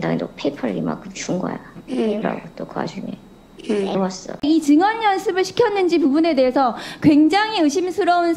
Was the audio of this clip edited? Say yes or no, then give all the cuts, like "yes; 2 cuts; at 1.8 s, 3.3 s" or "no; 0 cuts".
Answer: yes; 1 cut; at 4.4 s